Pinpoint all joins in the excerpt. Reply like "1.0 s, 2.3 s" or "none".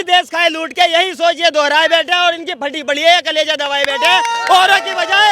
none